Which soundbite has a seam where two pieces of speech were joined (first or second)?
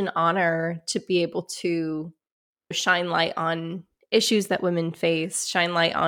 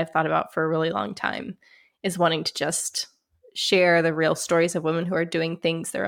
first